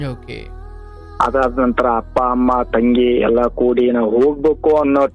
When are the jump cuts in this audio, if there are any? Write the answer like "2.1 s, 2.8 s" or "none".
none